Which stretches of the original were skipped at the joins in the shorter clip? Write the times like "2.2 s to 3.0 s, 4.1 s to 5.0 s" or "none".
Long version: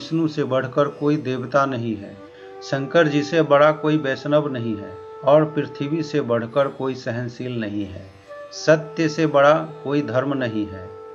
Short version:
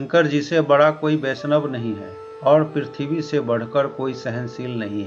none